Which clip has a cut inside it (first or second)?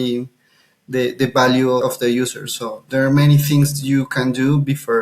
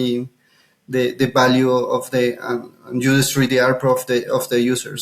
first